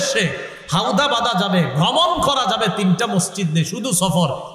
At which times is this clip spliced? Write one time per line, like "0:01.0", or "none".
none